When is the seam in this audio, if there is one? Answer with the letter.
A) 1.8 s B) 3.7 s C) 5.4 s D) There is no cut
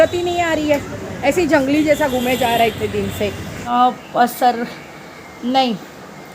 B